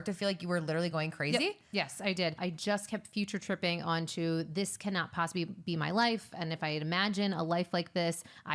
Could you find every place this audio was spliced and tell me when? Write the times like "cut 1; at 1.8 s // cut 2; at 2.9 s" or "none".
cut 1; at 2.4 s